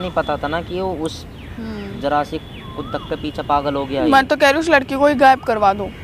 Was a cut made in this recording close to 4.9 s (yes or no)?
no